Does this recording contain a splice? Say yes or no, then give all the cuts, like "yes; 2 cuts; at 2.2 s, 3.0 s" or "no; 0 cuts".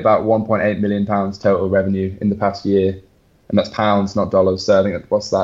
no; 0 cuts